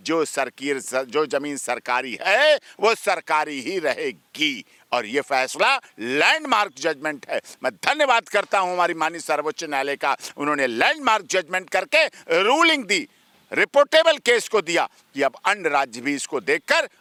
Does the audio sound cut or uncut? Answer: uncut